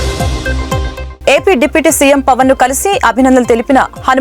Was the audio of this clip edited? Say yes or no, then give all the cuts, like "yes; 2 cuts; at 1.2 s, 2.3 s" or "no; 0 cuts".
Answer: yes; 1 cut; at 1.0 s